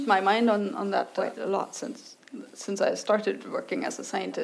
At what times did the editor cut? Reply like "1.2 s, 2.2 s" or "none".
1.1 s